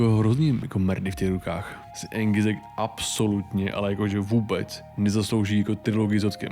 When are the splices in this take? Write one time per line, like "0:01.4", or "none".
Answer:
0:01.9